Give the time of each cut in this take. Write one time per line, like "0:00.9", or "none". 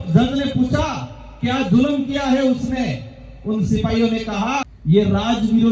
0:04.7